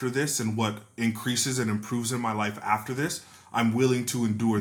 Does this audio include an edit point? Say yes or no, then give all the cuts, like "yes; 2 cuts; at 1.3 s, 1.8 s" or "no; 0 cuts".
no; 0 cuts